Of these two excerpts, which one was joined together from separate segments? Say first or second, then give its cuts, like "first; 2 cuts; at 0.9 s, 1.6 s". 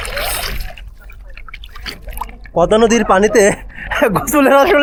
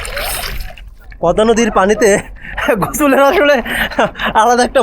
second; 1 cut; at 1.1 s